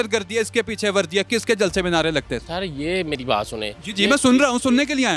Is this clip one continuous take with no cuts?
yes; 0 cuts

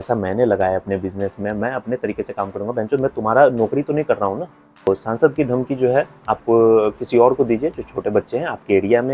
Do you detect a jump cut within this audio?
yes; 1 cut; at 4.9 s

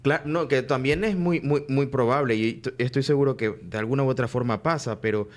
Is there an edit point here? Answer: no; 0 cuts

